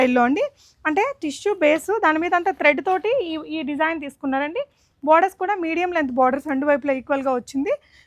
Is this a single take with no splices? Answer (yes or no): yes